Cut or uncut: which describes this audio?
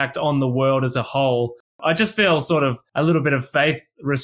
cut